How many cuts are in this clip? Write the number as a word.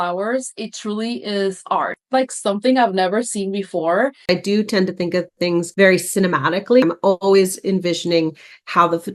two